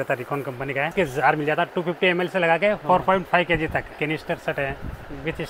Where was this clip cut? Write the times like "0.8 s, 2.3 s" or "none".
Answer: 0.9 s, 2.8 s, 4.0 s